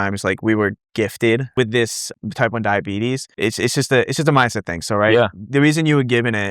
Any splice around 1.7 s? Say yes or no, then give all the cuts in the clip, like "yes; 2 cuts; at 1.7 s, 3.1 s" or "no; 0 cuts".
yes; 2 cuts; at 1.7 s, 3.3 s